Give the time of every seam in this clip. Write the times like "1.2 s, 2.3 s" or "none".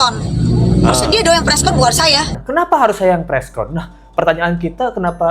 2.4 s